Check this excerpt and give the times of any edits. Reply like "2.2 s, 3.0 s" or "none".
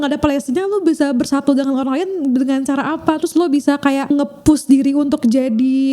4.1 s